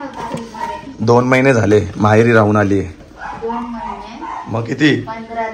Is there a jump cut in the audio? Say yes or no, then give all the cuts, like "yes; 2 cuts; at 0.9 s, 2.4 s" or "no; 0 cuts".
no; 0 cuts